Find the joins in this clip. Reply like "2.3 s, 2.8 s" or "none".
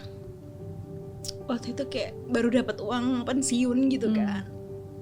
none